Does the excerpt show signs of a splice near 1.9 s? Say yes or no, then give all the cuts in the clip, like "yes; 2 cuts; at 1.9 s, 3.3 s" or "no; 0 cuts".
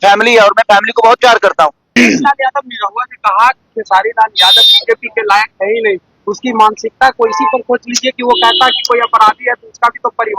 yes; 1 cut; at 1.9 s